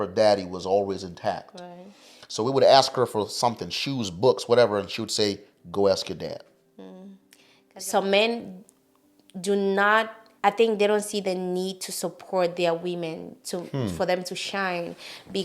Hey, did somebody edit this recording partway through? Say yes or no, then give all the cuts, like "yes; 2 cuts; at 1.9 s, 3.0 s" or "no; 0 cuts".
yes; 2 cuts; at 7.7 s, 10.2 s